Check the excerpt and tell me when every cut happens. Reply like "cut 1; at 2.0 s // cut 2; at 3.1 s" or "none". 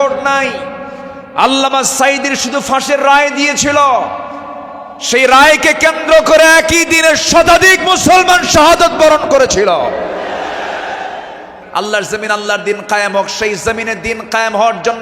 cut 1; at 11.6 s